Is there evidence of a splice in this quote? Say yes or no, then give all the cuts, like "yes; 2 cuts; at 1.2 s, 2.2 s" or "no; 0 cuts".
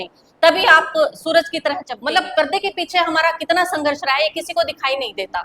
yes; 1 cut; at 1.9 s